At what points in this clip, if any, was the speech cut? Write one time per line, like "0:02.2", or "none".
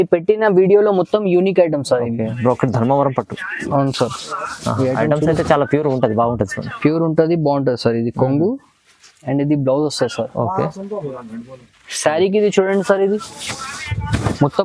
0:02.3